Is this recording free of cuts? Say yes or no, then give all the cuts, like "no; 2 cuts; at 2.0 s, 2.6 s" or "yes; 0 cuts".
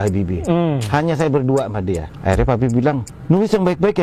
no; 2 cuts; at 2.1 s, 3.1 s